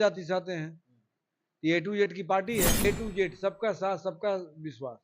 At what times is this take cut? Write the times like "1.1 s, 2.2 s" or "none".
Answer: 2.8 s